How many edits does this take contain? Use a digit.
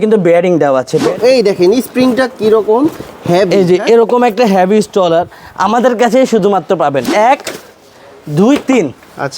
2